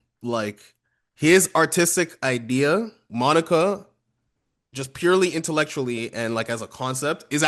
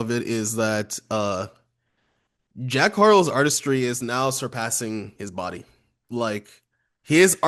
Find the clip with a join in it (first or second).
first